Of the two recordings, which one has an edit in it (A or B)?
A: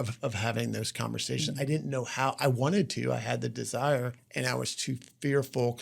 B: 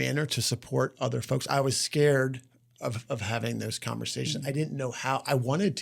A